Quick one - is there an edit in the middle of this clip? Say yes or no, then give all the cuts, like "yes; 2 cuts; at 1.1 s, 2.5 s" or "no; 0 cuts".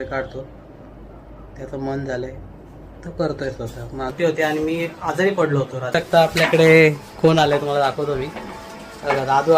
yes; 2 cuts; at 4.1 s, 6.0 s